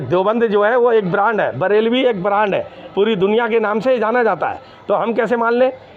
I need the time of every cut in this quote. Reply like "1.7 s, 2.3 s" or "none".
none

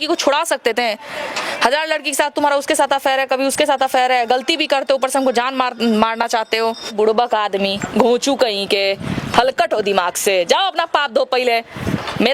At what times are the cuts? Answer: 6.9 s

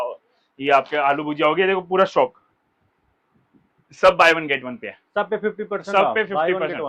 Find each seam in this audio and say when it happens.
none

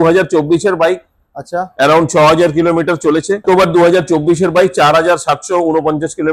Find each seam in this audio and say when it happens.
3.4 s

